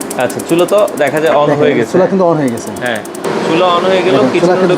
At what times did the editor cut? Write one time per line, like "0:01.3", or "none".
0:03.2